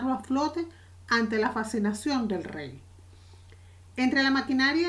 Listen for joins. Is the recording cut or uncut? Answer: uncut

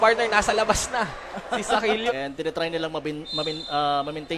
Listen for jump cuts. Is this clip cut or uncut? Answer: uncut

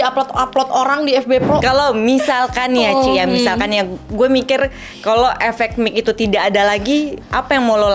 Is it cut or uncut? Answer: cut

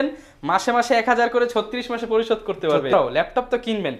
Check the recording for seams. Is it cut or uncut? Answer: cut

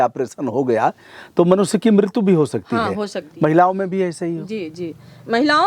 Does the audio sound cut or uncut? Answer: cut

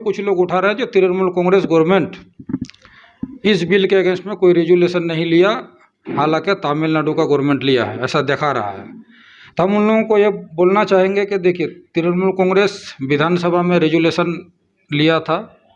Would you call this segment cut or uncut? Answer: uncut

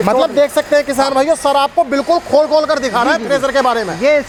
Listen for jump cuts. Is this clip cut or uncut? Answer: uncut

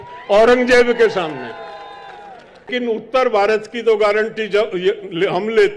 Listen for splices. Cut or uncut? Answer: cut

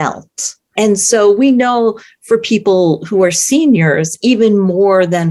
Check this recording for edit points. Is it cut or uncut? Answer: uncut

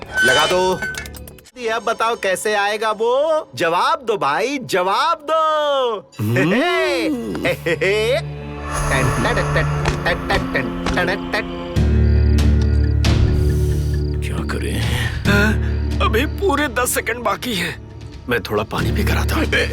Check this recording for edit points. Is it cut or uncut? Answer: cut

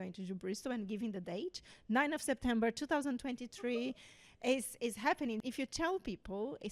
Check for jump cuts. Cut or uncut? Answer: cut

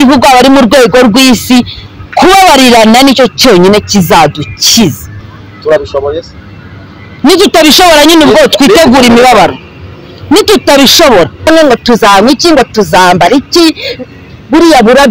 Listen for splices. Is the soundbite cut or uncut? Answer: cut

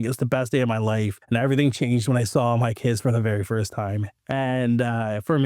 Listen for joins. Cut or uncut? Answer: cut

